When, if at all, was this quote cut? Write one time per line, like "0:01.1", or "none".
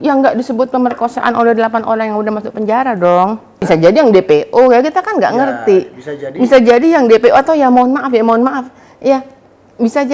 0:03.7